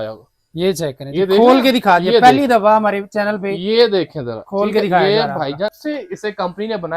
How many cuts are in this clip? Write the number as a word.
one